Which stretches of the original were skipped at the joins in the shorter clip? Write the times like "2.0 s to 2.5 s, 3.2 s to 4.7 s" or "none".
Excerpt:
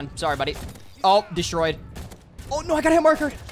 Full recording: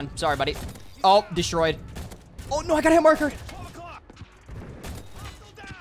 none